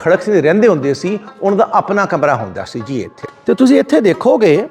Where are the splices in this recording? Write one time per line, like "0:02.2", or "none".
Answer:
0:03.2